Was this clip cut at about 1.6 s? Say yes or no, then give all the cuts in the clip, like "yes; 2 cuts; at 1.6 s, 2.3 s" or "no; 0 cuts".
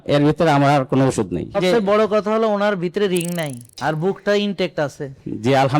yes; 2 cuts; at 1.6 s, 3.6 s